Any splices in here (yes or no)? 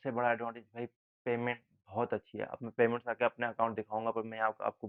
no